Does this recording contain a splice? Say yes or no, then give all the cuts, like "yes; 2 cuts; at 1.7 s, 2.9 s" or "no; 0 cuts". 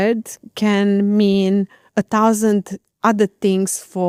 no; 0 cuts